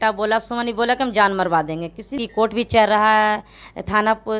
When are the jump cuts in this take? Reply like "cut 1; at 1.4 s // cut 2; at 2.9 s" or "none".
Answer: cut 1; at 2.1 s

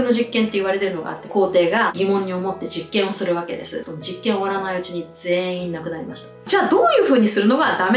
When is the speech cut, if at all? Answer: cut 1; at 1.3 s // cut 2; at 3.8 s // cut 3; at 6.4 s

